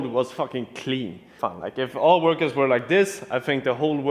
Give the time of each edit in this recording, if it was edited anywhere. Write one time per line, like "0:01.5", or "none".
0:01.3